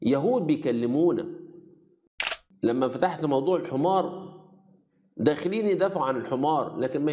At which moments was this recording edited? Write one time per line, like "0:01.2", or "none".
0:02.1